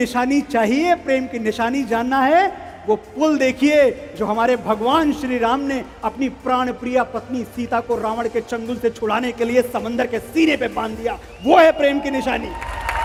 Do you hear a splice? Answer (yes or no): no